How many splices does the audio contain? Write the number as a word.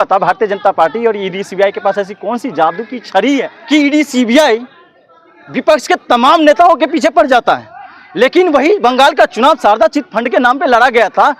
one